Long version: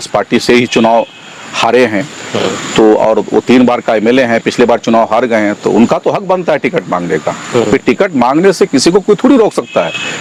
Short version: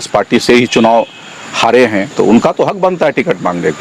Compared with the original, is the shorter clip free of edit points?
no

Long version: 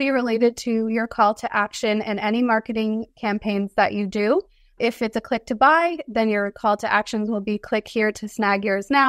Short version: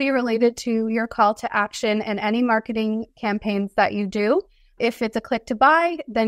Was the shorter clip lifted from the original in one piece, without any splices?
yes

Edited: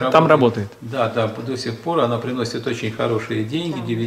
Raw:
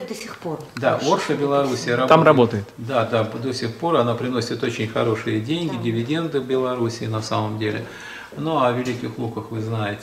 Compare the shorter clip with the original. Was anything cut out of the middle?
no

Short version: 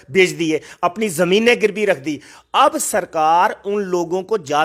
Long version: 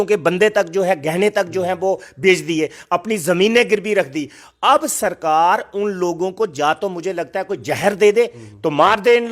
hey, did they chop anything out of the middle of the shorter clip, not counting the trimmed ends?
no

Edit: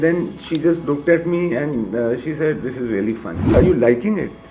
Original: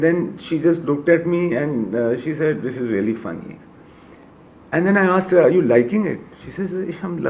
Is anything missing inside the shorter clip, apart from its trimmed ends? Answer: yes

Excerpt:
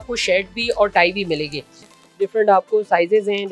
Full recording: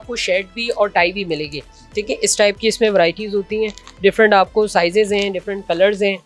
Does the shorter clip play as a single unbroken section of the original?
no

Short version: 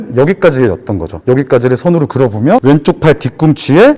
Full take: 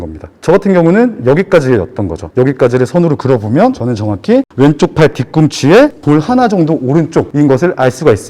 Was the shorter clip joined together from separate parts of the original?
yes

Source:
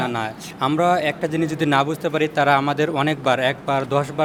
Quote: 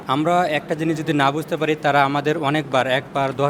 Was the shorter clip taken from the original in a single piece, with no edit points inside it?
yes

